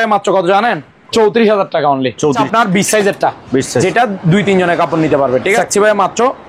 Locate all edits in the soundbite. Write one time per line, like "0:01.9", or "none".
0:02.4
0:05.6